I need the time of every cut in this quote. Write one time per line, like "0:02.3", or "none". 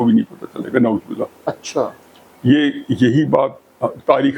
none